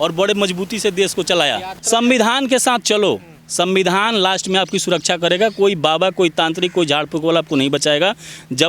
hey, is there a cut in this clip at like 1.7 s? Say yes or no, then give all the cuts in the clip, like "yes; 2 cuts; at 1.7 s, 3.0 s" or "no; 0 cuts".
yes; 1 cut; at 1.7 s